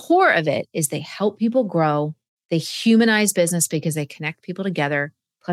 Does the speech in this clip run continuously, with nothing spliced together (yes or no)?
yes